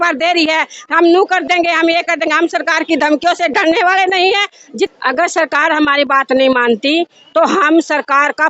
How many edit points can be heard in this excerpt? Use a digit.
1